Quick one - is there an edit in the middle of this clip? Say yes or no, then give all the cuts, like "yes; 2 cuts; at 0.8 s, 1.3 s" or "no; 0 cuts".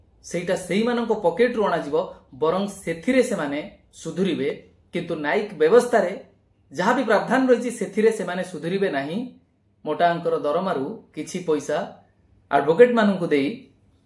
no; 0 cuts